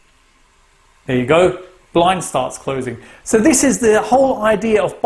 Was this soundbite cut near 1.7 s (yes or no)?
no